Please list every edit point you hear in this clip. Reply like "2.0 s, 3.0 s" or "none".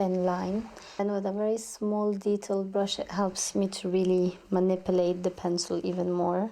1.0 s

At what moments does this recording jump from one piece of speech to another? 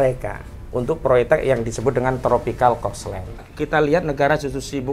3.5 s

